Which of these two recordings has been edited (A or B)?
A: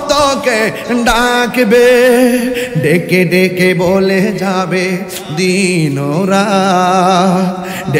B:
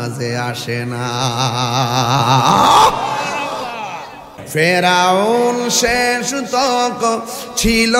B